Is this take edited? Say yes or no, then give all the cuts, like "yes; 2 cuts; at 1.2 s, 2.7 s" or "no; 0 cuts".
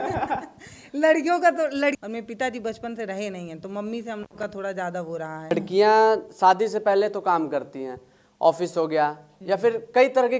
yes; 2 cuts; at 2.0 s, 5.5 s